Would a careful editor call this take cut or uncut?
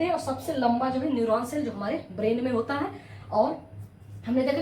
uncut